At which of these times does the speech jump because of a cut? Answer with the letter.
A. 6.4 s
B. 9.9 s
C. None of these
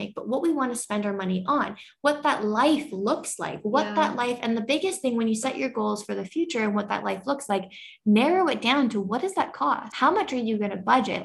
B